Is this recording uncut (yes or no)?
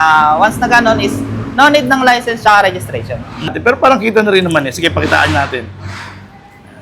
no